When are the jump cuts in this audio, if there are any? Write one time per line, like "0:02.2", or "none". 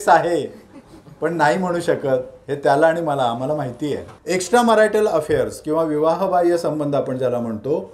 0:04.1